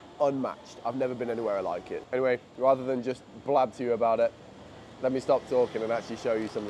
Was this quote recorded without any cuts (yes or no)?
yes